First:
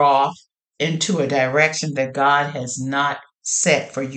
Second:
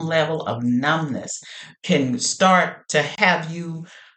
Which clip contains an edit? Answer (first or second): second